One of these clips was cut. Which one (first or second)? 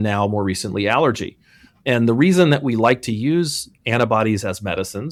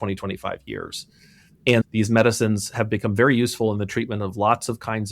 second